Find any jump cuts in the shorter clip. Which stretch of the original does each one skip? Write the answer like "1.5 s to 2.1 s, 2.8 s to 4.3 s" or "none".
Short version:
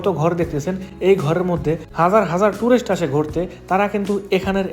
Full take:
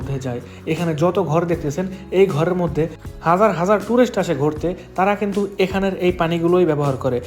3.0 s to 3.1 s